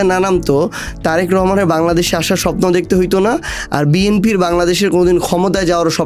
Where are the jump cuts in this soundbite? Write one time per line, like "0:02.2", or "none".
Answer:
none